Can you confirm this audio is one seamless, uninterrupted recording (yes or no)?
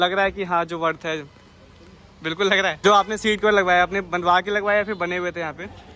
no